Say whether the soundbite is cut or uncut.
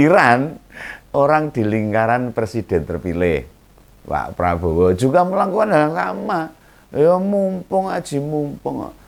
uncut